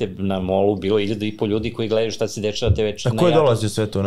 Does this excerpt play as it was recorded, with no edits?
yes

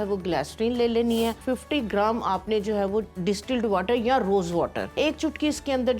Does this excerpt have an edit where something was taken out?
yes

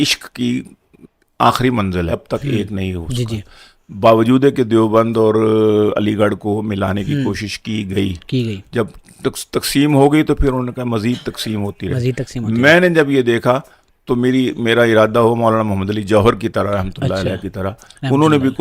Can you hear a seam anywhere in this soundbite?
yes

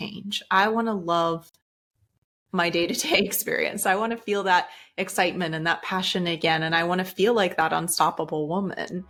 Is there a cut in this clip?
no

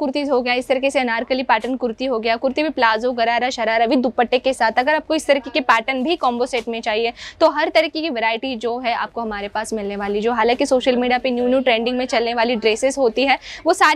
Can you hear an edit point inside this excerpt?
no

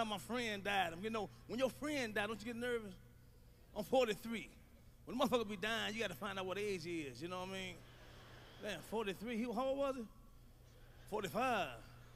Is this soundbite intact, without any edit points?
no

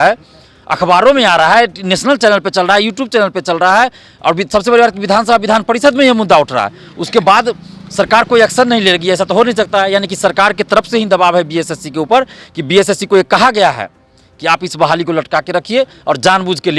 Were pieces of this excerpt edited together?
no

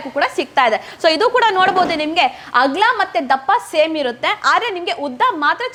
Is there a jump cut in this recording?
no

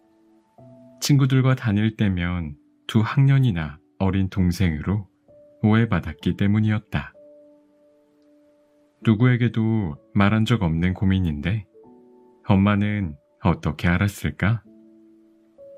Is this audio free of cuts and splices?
yes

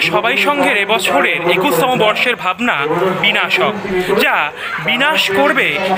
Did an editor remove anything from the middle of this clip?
no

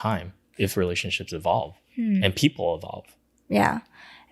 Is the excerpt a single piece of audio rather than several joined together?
yes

